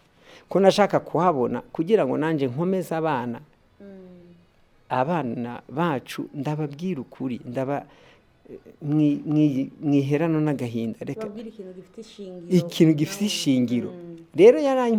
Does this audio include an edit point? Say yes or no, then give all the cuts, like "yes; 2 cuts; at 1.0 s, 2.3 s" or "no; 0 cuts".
no; 0 cuts